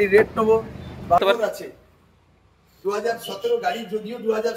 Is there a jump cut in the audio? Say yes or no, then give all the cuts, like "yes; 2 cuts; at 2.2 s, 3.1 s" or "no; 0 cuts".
yes; 1 cut; at 1.2 s